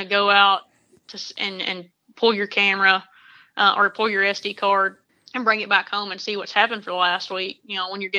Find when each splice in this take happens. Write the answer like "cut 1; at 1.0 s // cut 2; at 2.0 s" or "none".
none